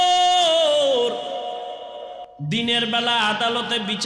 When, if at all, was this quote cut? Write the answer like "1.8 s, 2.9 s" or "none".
2.2 s